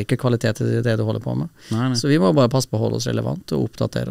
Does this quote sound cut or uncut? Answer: uncut